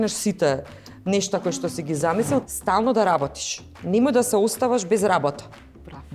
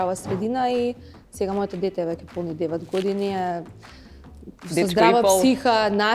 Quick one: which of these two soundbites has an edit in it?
first; 1 cut; at 2.4 s

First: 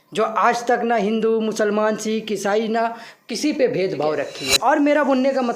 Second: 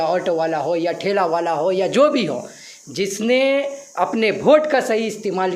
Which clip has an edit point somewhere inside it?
first; 1 cut; at 4.4 s

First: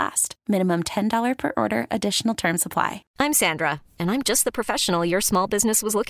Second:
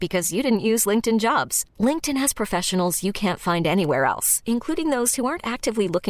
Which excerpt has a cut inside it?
first; 1 cut; at 3.0 s

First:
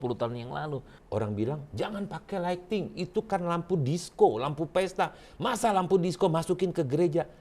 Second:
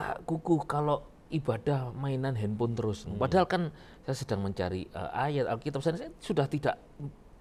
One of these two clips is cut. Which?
first; 1 cut; at 0.9 s

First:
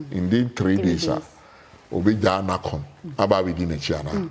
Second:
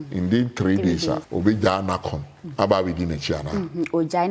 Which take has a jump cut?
second; 1 cut; at 1.3 s

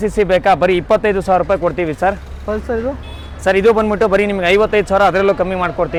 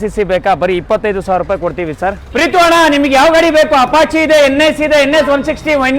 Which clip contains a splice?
second; 1 cut; at 2.2 s

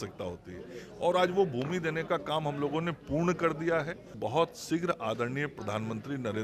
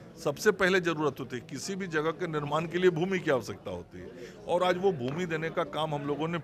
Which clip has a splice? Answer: first; 1 cut; at 4.1 s

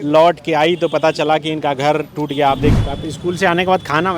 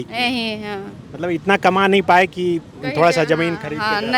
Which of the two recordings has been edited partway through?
first; 1 cut; at 2.8 s

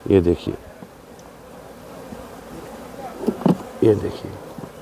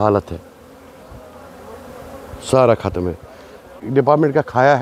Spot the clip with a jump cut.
second; 1 cut; at 3.8 s

